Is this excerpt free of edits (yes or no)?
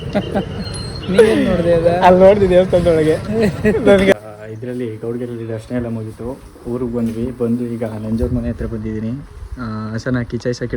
no